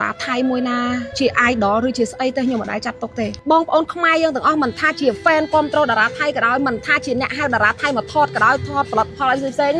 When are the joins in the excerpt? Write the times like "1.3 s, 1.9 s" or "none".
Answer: 3.4 s